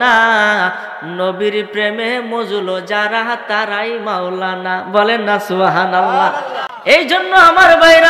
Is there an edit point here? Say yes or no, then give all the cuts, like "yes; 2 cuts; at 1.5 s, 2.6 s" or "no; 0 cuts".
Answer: no; 0 cuts